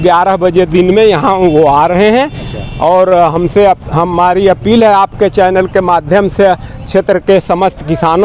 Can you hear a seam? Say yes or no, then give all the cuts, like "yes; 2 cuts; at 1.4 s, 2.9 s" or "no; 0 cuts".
no; 0 cuts